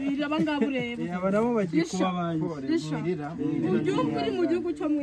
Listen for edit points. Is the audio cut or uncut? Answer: uncut